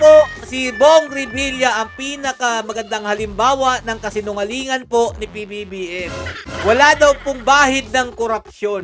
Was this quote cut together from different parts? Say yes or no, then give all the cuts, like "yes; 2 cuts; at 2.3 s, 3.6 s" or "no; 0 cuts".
no; 0 cuts